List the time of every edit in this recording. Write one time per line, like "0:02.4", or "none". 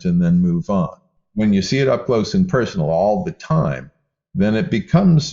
0:01.2